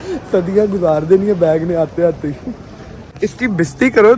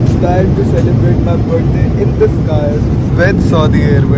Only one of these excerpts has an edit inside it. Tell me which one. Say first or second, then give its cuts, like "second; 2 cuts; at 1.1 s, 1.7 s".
first; 1 cut; at 3.0 s